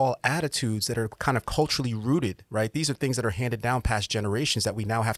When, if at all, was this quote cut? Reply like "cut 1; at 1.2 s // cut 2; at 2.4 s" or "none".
none